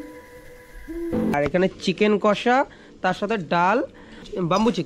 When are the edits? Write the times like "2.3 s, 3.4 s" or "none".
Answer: 1.3 s

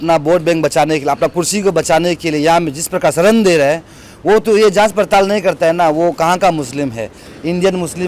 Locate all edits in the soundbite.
none

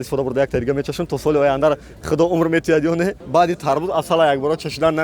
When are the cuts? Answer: 3.2 s

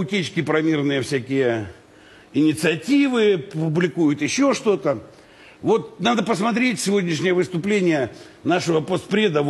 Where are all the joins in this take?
none

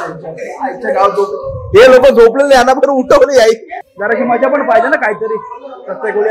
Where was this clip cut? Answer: 3.7 s

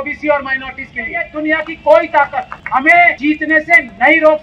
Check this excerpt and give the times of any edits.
1.2 s, 2.6 s, 3.2 s

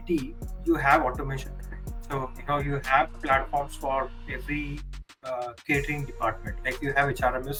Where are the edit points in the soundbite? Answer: none

